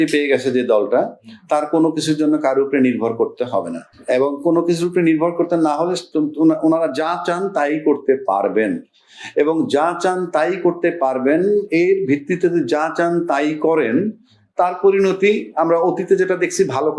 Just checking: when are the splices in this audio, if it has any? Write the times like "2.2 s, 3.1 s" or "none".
none

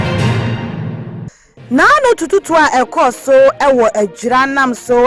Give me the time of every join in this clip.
1.1 s

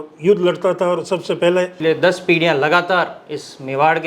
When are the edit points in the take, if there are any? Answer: 1.7 s

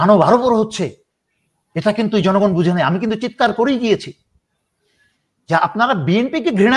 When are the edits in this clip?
none

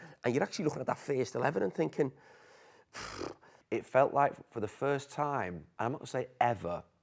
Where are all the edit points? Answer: 3.5 s, 5.6 s

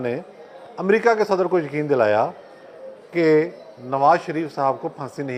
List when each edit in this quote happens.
none

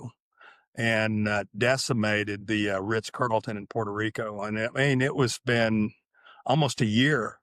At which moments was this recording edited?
none

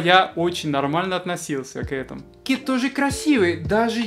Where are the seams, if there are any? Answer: 2.4 s

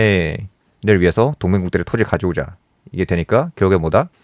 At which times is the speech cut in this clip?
none

